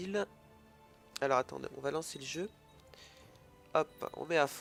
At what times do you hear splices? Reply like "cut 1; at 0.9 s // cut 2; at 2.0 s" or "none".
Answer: none